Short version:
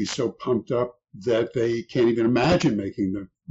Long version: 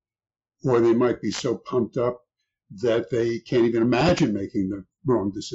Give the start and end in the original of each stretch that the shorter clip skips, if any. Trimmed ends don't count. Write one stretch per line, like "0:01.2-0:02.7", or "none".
0:02.3-0:02.6